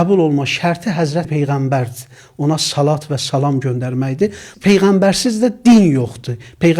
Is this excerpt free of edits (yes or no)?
no